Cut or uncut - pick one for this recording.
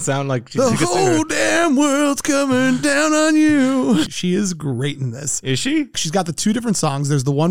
cut